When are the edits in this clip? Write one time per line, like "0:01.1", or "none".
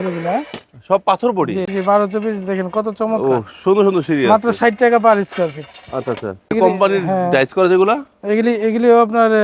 0:01.7
0:06.5